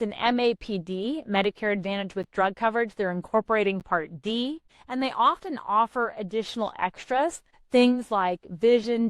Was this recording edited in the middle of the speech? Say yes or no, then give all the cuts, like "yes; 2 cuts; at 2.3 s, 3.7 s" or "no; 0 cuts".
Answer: yes; 2 cuts; at 4.7 s, 7.5 s